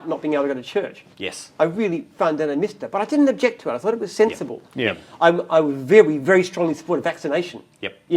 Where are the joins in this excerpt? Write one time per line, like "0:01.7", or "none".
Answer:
none